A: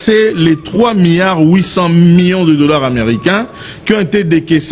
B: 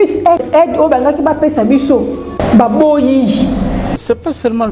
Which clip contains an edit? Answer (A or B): B